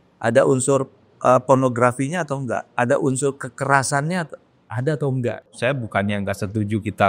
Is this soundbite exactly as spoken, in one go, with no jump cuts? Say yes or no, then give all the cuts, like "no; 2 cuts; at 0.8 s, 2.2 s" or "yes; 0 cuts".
no; 1 cut; at 5.5 s